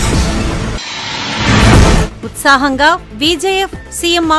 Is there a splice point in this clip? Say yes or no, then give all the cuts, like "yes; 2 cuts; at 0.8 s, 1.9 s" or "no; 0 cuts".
no; 0 cuts